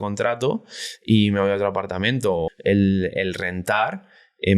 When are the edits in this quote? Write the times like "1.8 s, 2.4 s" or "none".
2.5 s